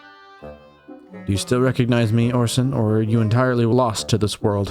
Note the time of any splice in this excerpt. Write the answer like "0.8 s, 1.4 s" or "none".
3.7 s